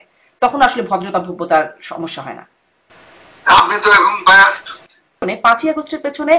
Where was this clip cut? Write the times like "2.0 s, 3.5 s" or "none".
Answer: 5.2 s